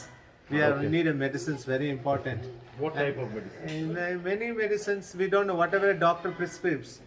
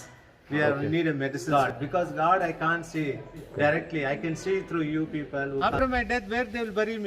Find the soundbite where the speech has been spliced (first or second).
second